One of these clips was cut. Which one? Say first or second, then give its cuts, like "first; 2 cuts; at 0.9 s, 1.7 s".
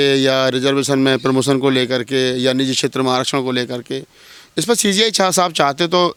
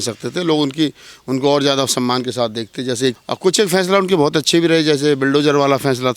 second; 1 cut; at 3.2 s